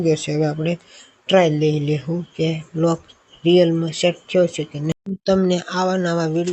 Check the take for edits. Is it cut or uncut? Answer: cut